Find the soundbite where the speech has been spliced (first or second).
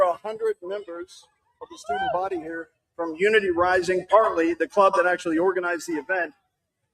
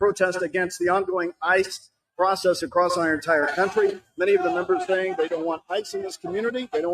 second